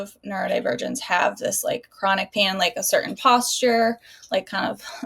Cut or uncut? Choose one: uncut